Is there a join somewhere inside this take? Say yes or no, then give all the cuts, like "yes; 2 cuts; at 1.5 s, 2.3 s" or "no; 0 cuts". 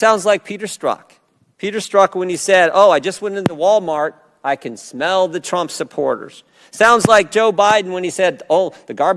no; 0 cuts